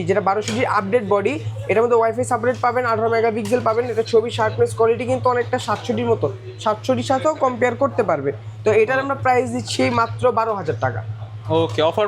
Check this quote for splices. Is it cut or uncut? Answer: uncut